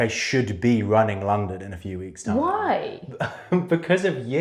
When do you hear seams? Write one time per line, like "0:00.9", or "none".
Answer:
none

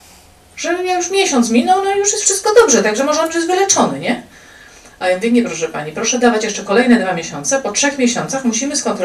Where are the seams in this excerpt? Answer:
none

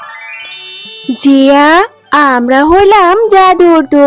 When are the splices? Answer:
0:01.1

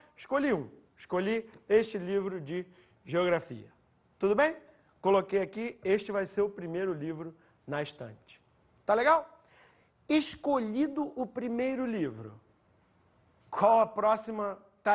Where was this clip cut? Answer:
0:09.9

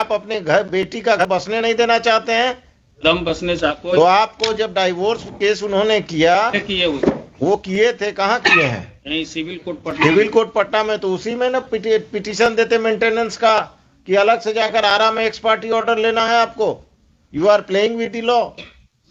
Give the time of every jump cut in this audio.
0:01.2

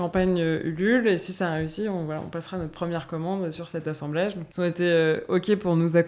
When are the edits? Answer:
0:04.4

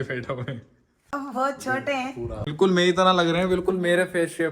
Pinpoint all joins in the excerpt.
0:01.0
0:02.4

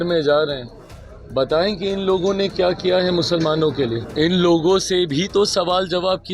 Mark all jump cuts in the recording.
0:04.0

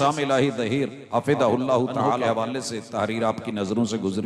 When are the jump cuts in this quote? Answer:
0:01.0
0:02.2

